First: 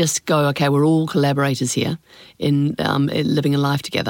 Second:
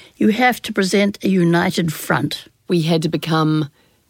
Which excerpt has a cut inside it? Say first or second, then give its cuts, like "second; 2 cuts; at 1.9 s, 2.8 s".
second; 1 cut; at 2.5 s